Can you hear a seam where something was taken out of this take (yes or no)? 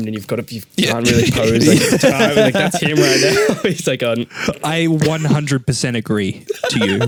no